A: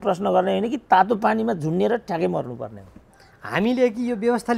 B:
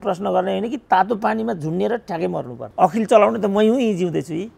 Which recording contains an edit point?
B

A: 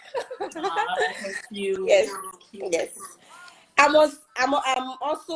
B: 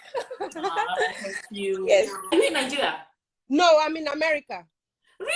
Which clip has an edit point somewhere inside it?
B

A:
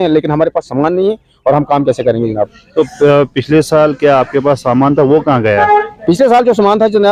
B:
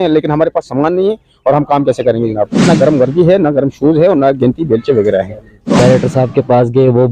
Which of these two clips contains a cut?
B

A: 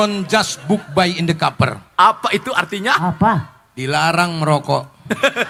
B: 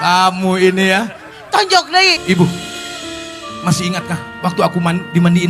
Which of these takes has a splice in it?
B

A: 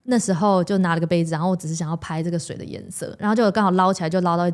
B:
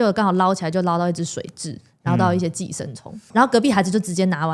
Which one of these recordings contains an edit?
B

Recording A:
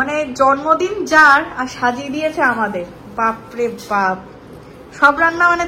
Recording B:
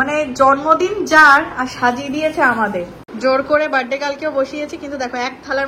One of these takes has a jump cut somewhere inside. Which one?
B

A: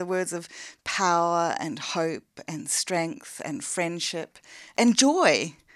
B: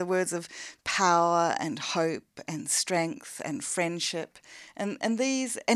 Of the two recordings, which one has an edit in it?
A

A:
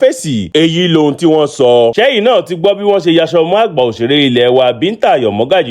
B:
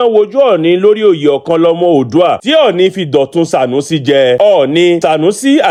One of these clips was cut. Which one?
A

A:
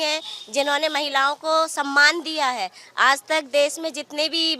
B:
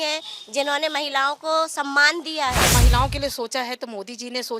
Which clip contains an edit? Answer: B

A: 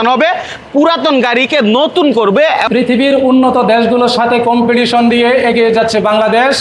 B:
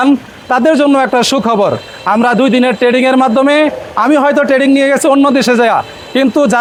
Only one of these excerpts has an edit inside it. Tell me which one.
A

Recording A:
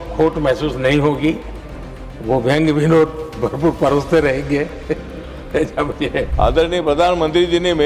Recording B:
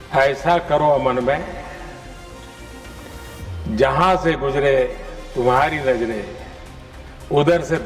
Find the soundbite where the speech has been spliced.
A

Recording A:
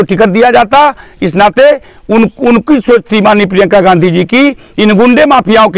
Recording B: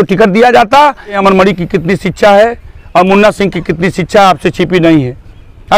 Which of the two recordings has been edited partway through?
B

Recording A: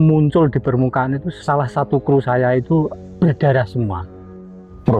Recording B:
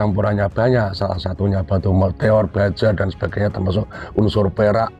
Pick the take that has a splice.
A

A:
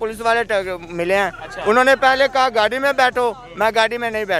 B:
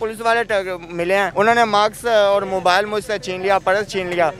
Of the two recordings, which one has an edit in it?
B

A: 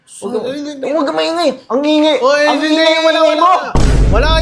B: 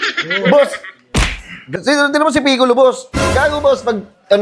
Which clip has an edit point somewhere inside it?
B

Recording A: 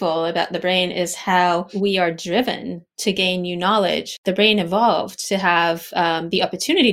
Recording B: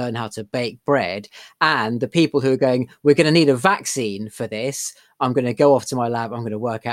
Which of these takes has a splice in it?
A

